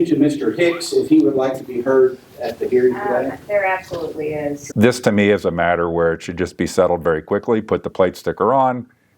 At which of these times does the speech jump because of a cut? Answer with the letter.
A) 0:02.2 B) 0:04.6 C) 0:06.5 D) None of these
B